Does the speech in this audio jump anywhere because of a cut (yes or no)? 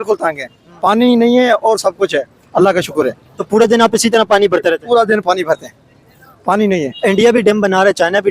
yes